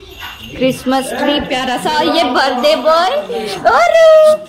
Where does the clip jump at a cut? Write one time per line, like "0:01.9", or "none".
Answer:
none